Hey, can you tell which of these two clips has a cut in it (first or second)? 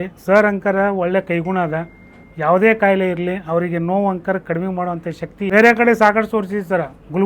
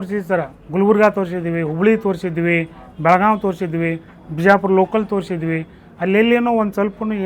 first